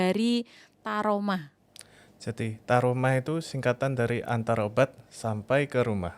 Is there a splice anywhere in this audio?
no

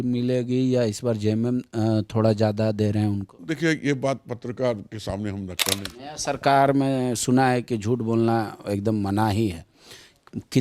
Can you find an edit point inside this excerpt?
yes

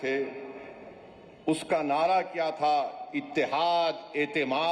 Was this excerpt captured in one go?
yes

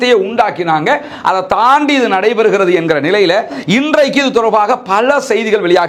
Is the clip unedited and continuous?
yes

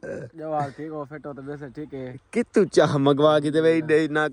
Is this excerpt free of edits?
yes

